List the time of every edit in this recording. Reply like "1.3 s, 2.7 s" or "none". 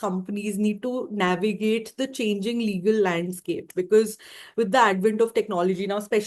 none

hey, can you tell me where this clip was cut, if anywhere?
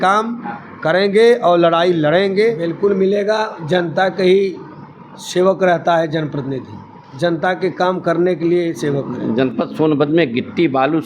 2.7 s, 9.1 s

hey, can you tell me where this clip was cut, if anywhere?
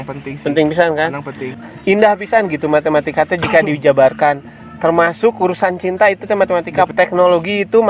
1.6 s, 6.9 s

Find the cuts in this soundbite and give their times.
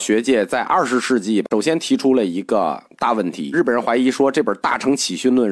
3.5 s

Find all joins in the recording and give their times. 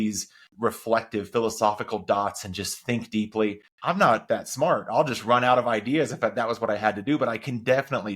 4.2 s

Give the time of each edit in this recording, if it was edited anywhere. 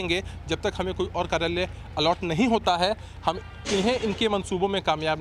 none

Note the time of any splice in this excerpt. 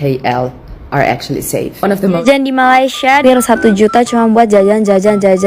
2.2 s, 3.2 s

